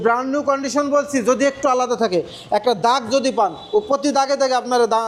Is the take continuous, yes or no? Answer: yes